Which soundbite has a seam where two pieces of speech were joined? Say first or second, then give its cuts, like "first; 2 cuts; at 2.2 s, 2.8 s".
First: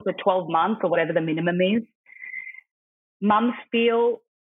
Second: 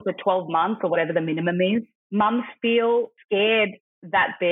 second; 2 cuts; at 2.0 s, 3.2 s